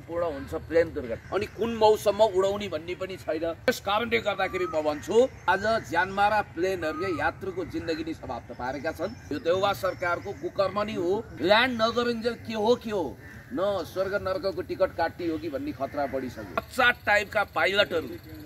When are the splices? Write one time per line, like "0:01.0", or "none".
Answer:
0:01.2
0:03.7
0:05.4
0:09.2
0:11.3
0:16.7